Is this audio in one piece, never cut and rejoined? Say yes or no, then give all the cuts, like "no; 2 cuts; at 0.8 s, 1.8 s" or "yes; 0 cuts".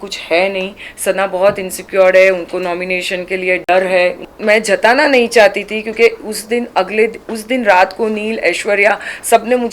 no; 1 cut; at 4.3 s